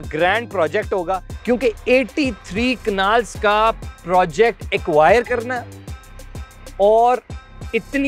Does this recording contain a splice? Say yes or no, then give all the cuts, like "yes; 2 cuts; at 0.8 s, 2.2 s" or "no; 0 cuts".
yes; 1 cut; at 1.3 s